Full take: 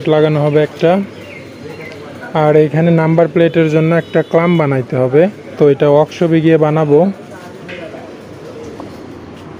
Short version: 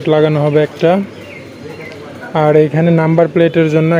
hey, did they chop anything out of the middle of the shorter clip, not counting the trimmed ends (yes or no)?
no